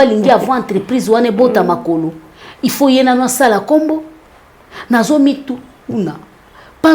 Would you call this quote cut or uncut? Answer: uncut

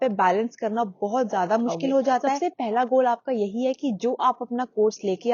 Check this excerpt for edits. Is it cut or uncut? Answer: cut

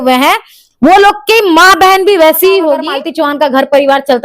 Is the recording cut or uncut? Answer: cut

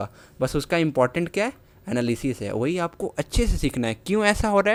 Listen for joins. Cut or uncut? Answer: uncut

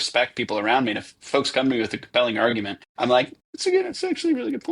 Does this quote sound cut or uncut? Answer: cut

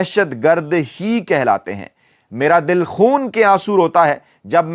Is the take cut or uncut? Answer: cut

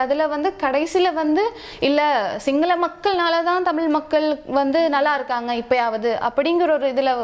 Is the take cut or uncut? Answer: uncut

